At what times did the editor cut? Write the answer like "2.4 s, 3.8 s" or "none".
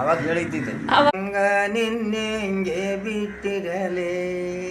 1.1 s